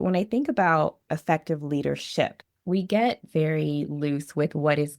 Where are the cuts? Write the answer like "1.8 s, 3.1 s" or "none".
1.0 s, 2.4 s